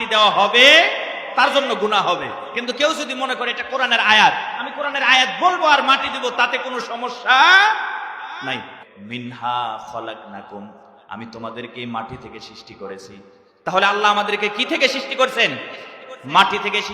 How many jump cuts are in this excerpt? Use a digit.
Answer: 1